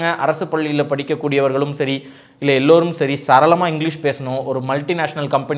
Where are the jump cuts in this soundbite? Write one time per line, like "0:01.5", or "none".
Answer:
none